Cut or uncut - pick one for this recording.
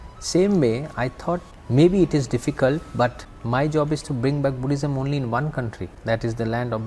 cut